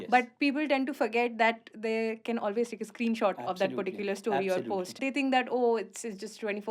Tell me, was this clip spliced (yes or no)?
yes